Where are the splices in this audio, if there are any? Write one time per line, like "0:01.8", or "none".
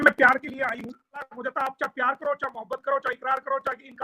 0:01.3